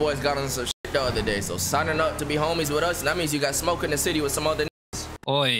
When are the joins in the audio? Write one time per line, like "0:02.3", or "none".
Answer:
0:00.9
0:04.7